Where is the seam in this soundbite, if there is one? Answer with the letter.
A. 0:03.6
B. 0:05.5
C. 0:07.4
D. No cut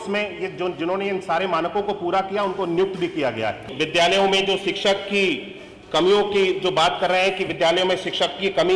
A